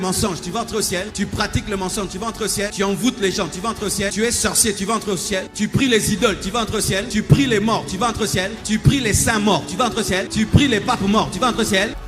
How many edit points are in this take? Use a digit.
7